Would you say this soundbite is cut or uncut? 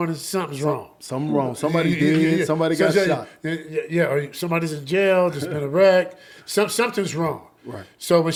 uncut